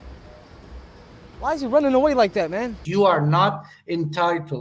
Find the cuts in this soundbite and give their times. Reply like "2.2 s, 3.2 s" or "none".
2.8 s